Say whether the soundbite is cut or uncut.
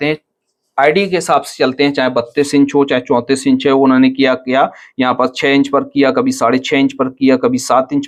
uncut